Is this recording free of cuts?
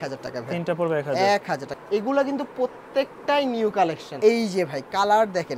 no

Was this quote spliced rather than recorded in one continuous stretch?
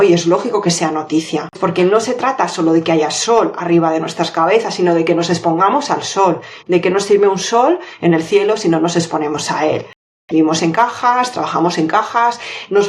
yes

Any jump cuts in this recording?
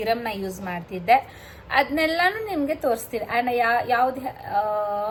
no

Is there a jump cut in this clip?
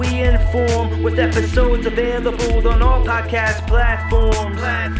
no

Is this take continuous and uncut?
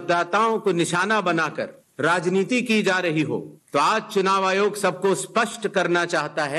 yes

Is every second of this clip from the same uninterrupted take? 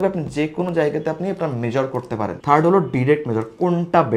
yes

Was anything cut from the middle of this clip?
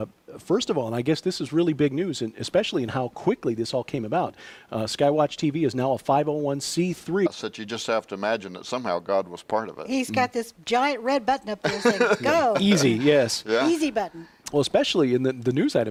no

